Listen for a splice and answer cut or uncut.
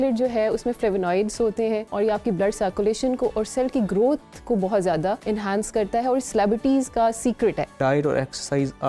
cut